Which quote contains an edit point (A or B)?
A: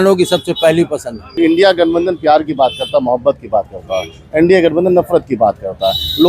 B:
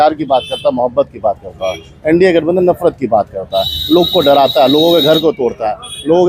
A